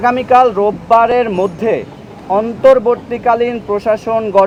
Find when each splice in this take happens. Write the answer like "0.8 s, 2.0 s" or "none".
none

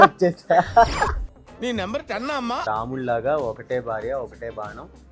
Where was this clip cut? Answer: 2.6 s

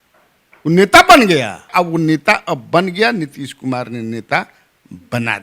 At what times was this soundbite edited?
1.7 s

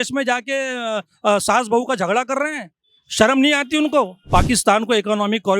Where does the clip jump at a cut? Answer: 4.2 s

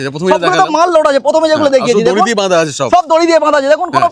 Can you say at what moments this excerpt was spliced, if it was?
none

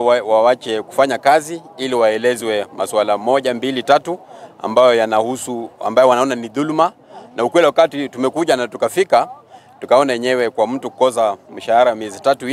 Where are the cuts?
none

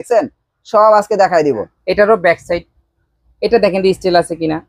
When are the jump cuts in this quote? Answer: 1.8 s

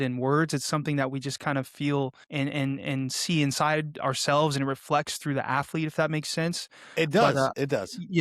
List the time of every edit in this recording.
2.2 s

